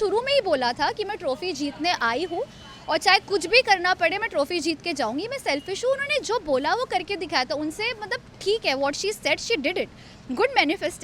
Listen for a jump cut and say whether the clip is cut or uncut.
uncut